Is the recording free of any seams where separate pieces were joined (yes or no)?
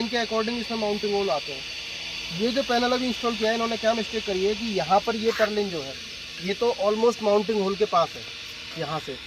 yes